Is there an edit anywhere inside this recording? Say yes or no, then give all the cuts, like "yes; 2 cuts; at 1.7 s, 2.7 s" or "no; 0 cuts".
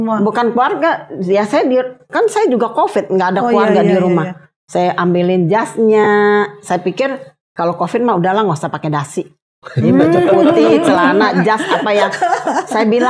no; 0 cuts